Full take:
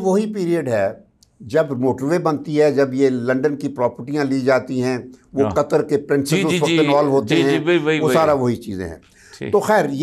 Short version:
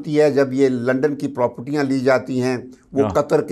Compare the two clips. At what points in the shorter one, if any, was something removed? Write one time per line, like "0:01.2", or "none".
none

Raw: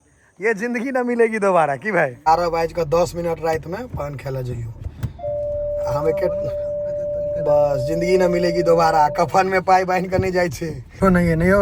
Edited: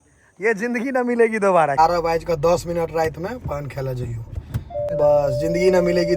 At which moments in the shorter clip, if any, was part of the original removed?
0:01.7
0:04.9

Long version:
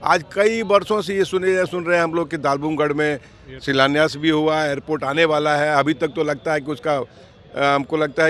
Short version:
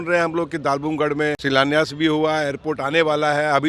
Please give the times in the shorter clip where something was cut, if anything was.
0:01.4

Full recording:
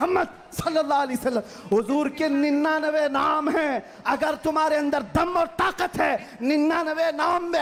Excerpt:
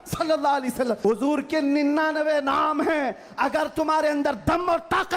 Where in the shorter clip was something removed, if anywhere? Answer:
0:01.0

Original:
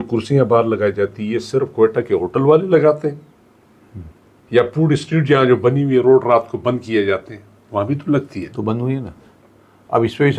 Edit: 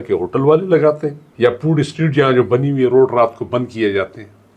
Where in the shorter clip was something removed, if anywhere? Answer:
0:01.2

